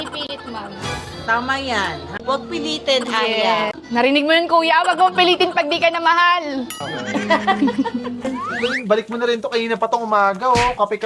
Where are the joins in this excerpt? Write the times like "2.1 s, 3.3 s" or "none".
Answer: 2.1 s, 3.7 s, 6.8 s, 8.4 s